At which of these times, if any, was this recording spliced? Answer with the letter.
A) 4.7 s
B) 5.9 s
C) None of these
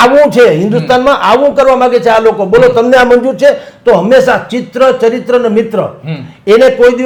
C